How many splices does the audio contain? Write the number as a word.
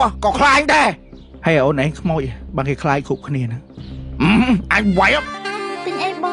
one